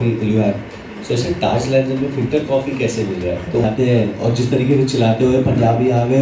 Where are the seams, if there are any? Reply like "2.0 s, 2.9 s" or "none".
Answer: 3.6 s